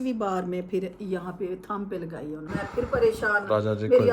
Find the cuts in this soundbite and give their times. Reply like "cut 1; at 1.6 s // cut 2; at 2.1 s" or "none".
cut 1; at 2.5 s